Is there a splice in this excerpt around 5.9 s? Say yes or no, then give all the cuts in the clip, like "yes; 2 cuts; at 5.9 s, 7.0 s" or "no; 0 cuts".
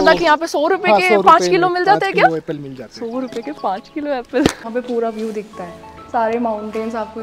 no; 1 cut; at 4.6 s